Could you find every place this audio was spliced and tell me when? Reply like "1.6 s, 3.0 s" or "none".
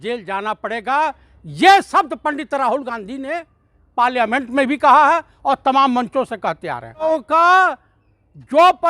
7.1 s